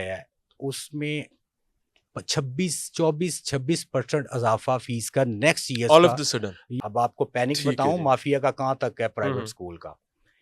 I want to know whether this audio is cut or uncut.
cut